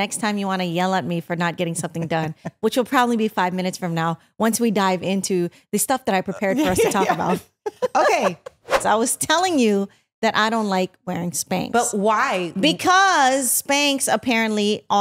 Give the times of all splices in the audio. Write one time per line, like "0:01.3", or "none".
0:08.8